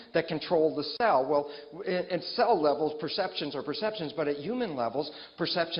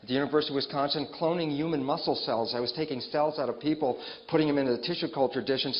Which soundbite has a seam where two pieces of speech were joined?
second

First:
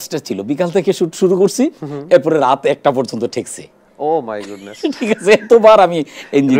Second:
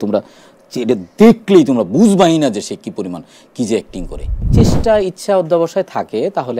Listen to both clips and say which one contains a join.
second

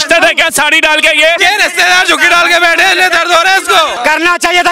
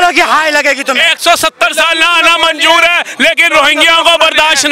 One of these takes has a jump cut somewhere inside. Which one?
first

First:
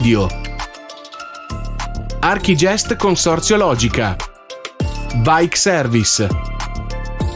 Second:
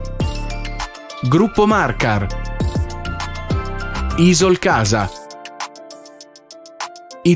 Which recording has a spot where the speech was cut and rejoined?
second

